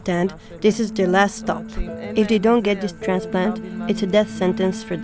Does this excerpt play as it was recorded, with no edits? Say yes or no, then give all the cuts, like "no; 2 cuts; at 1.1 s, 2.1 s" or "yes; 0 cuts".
yes; 0 cuts